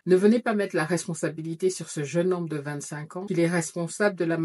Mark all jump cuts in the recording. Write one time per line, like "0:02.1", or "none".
none

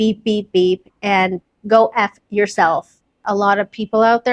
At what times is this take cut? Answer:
0:03.2

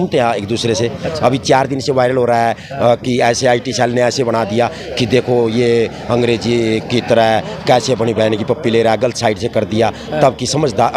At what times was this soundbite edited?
none

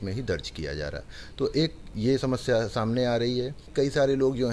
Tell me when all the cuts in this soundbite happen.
0:03.6

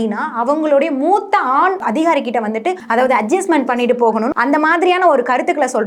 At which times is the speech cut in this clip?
0:01.8
0:02.8
0:04.3

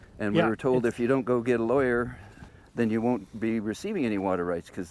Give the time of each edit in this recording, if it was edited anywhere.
none

